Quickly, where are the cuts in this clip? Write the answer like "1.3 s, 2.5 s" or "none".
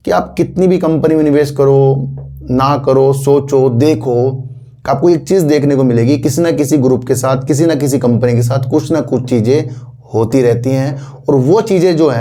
none